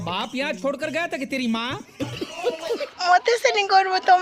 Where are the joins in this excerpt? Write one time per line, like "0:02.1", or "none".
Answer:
0:02.9